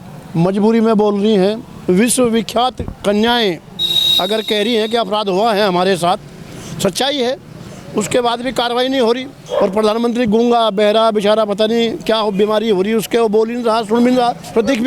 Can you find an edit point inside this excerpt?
yes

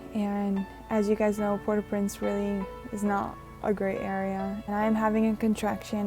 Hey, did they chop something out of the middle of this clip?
yes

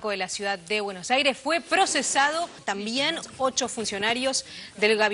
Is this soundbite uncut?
no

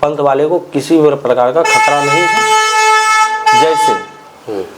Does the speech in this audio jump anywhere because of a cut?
no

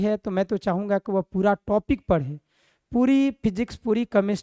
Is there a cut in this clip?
no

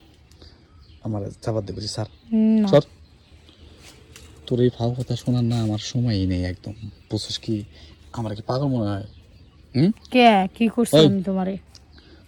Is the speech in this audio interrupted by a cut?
no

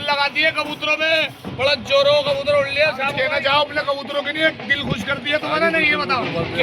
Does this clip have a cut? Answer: yes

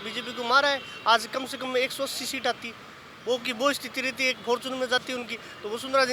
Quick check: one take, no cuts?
yes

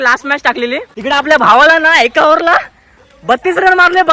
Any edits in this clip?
yes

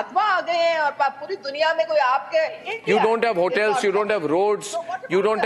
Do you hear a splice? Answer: yes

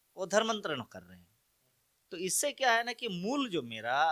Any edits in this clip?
no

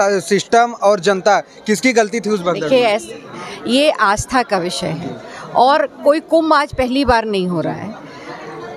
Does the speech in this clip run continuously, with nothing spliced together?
yes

